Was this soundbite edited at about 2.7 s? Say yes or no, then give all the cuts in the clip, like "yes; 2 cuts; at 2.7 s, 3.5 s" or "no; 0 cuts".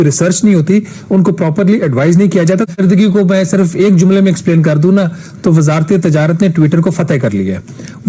yes; 1 cut; at 2.7 s